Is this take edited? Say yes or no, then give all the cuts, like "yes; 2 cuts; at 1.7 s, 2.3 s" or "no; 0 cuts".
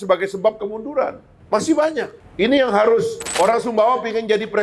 yes; 3 cuts; at 1.3 s, 2.2 s, 3.2 s